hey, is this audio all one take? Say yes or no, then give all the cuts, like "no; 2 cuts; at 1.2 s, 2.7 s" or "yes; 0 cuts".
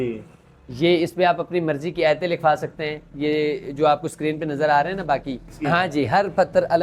no; 1 cut; at 5.5 s